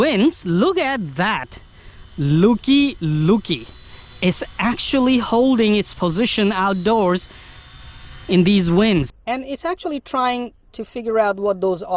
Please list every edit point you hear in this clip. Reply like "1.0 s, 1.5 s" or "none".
9.2 s